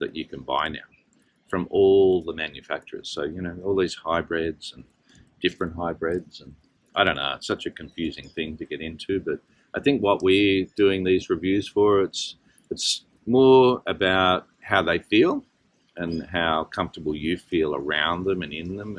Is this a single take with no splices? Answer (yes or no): yes